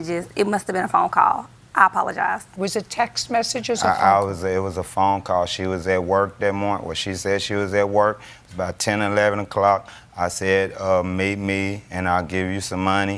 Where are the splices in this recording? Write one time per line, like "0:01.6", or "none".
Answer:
0:04.1